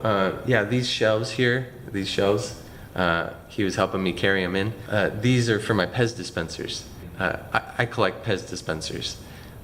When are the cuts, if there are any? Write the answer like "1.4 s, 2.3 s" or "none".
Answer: none